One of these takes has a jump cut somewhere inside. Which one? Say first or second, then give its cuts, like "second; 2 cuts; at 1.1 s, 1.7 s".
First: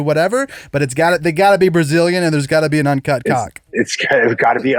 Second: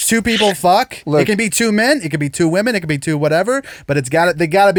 first; 1 cut; at 3.6 s